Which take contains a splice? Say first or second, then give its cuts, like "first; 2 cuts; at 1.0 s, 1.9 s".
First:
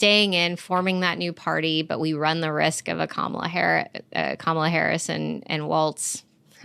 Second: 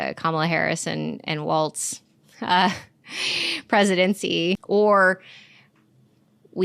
second; 1 cut; at 4.6 s